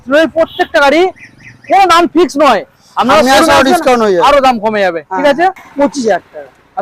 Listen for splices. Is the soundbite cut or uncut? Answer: cut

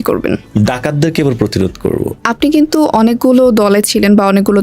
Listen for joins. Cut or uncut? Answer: cut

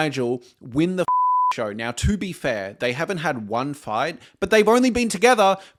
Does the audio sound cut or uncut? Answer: uncut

